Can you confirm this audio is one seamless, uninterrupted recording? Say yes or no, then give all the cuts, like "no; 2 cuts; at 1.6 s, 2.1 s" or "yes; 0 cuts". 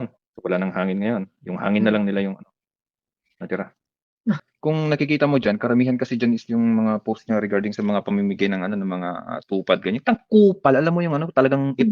no; 1 cut; at 4.5 s